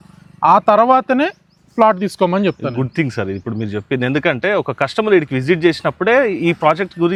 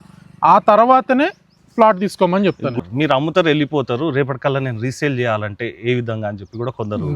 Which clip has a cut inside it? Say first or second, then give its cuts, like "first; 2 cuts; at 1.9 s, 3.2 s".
second; 1 cut; at 2.8 s